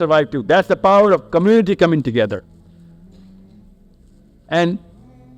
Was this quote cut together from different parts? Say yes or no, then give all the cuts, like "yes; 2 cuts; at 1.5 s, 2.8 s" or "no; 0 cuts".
no; 0 cuts